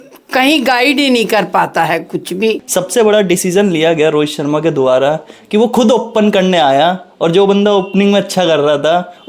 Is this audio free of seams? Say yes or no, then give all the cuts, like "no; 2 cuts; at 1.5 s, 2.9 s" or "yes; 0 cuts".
no; 1 cut; at 2.6 s